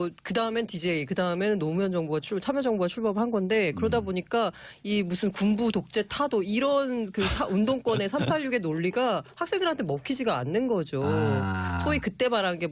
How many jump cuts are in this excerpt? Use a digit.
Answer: 0